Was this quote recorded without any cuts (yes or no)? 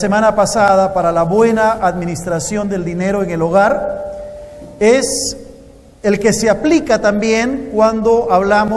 no